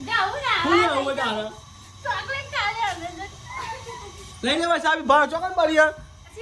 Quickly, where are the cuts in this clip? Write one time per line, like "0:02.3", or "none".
none